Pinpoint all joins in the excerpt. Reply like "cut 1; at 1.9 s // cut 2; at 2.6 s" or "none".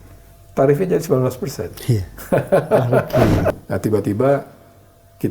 cut 1; at 3.6 s